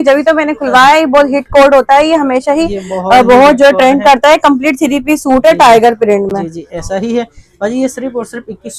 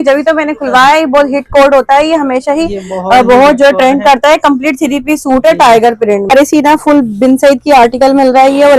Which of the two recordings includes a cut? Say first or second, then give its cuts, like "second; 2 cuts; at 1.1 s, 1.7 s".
second; 1 cut; at 6.3 s